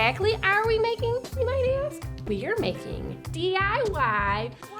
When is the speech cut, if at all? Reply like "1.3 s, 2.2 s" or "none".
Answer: 2.2 s